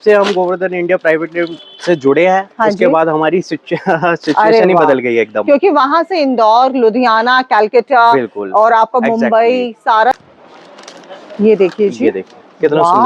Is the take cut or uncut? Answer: cut